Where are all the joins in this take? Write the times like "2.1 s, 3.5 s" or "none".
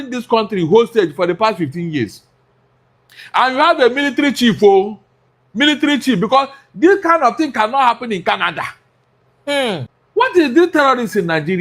9.9 s